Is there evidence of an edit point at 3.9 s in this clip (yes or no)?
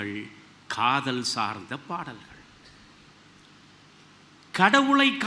yes